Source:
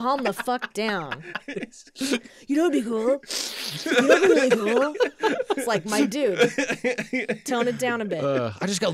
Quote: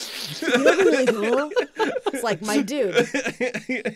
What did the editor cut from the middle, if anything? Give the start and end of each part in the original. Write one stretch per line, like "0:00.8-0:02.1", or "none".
none